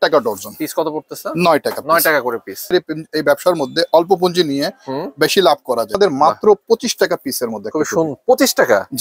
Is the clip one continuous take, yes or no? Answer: no